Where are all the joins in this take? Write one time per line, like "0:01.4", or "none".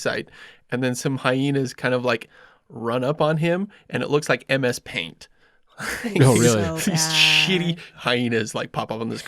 0:07.9

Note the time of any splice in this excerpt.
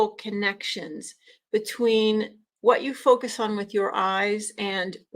none

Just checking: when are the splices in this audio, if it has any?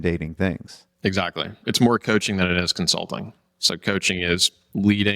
0:01.7

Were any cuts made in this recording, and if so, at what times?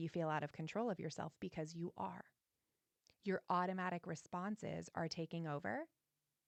none

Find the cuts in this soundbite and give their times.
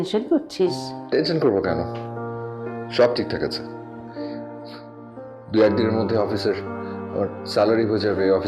0:00.9

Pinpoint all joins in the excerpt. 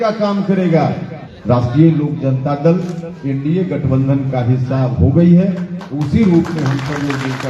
0:01.1

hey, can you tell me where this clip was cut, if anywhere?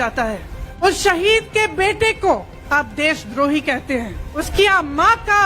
0:00.8
0:02.5
0:04.4

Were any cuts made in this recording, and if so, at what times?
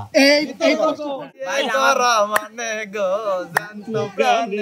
0:01.1

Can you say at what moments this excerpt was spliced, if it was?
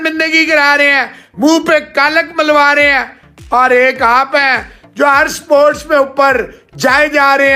none

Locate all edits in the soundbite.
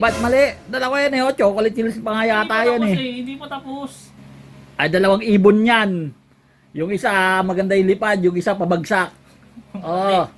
0:04.1

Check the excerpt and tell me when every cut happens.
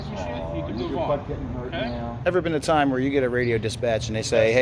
0:02.2

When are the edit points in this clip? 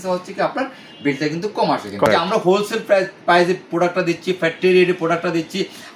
0:02.1

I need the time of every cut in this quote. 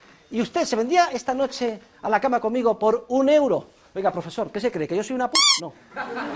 none

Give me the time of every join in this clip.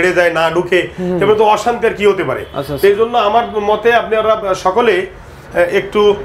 none

